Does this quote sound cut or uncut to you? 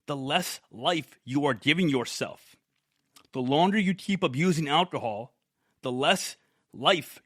uncut